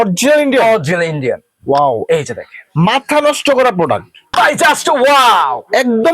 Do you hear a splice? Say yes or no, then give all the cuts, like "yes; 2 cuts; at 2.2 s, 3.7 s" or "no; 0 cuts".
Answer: yes; 1 cut; at 4.2 s